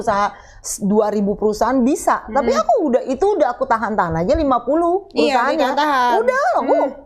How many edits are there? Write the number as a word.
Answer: zero